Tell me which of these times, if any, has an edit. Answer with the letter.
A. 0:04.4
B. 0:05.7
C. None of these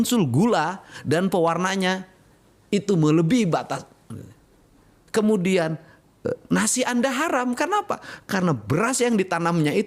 C